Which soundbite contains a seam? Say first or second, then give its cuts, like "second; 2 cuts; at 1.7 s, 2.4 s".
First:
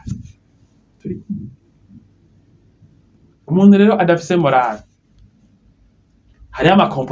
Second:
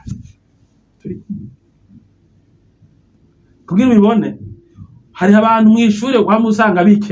first; 1 cut; at 3.4 s